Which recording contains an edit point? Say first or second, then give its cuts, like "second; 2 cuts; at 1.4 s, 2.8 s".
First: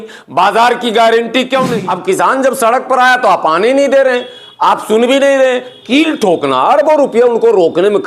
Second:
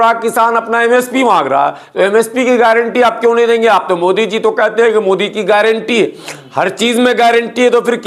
first; 1 cut; at 1.7 s